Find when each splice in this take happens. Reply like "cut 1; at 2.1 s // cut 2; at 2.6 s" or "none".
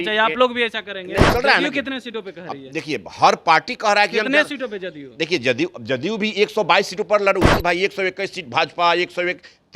cut 1; at 1.3 s // cut 2; at 7.5 s